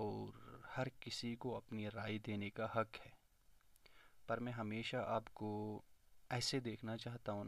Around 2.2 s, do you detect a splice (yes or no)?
no